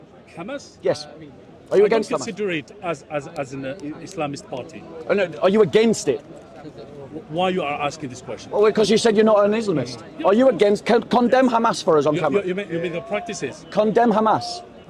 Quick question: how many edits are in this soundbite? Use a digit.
0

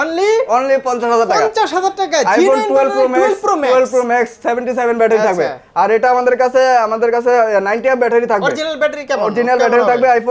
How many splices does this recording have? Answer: 0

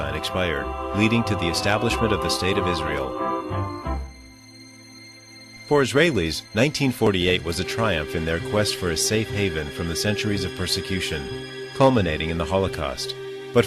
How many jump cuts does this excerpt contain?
1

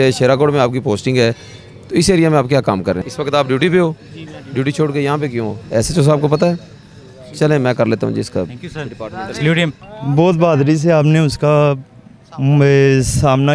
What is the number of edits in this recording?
3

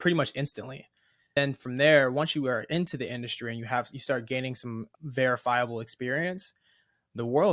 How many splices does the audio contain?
2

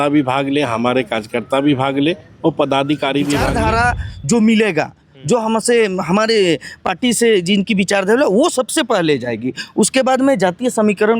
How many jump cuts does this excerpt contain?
1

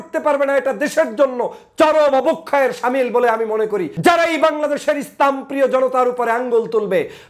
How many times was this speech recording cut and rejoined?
1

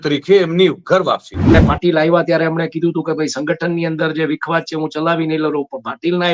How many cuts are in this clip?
1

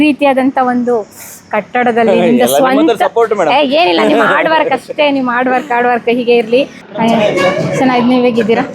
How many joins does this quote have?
1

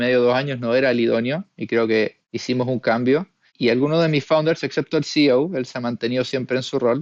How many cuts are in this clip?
2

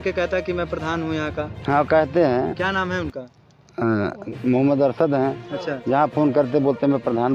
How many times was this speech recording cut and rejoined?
0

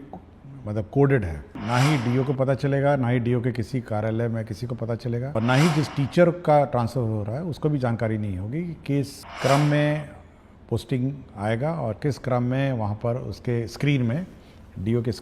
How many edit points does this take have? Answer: 3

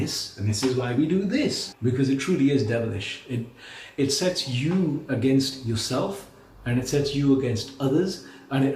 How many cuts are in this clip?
1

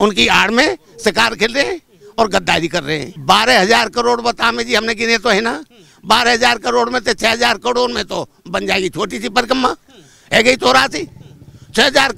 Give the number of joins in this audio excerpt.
1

